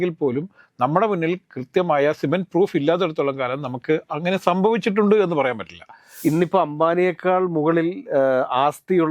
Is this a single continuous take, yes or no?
no